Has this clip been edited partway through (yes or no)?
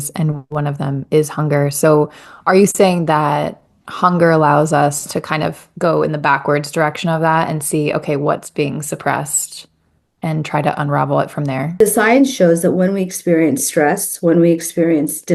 yes